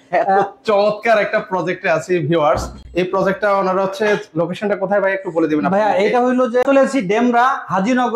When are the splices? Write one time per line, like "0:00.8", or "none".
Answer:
none